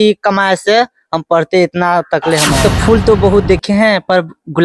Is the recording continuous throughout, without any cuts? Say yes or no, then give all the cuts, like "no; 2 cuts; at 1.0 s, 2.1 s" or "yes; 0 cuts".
no; 1 cut; at 2.6 s